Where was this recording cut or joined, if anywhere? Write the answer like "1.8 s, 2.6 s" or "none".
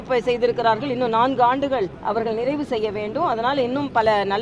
2.0 s